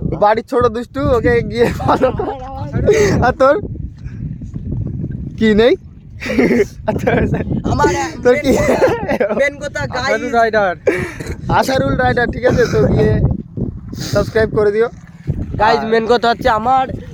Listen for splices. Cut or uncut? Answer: uncut